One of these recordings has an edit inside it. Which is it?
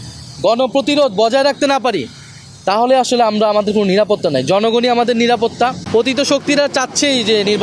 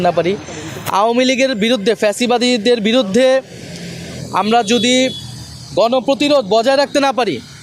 first; 1 cut; at 5.8 s

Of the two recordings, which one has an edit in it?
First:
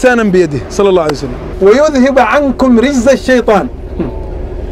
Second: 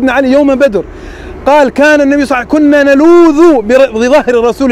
first; 1 cut; at 1.4 s

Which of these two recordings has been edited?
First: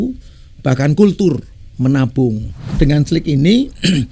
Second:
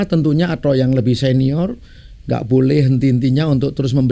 first; 1 cut; at 2.6 s

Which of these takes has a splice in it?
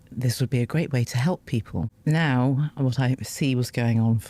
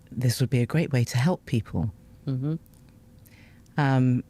first; 1 cut; at 1.9 s

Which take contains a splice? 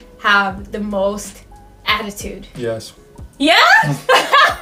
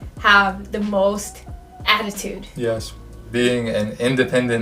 second; 1 cut; at 3.3 s

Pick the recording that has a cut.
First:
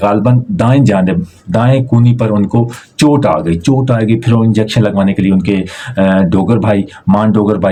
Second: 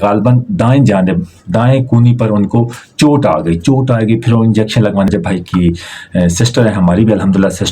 second; 1 cut; at 5.1 s

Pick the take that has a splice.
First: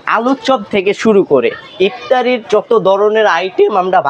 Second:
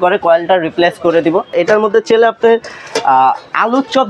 second; 1 cut; at 1.5 s

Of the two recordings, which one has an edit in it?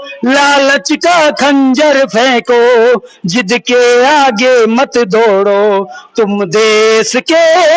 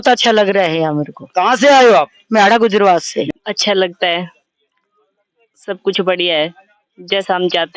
second; 1 cut; at 3.3 s

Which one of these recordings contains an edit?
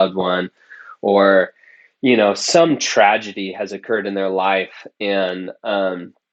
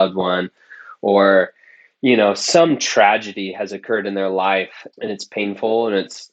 second; 1 cut; at 4.8 s

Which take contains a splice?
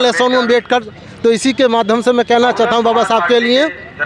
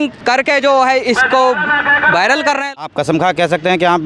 second; 1 cut; at 2.7 s

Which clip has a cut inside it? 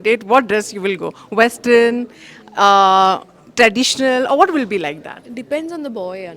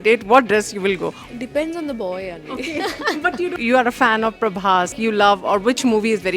second; 3 cuts; at 1.1 s, 3.6 s, 4.9 s

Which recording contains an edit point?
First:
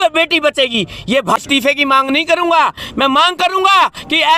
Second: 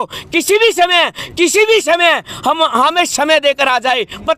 first; 1 cut; at 1.4 s

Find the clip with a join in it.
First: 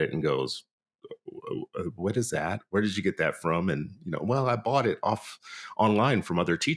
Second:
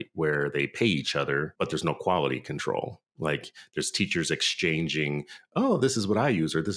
second; 1 cut; at 1.5 s

